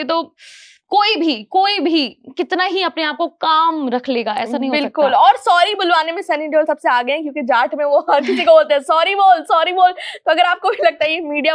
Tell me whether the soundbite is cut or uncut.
uncut